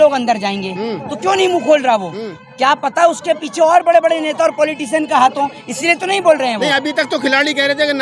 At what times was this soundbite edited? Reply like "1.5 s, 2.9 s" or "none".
none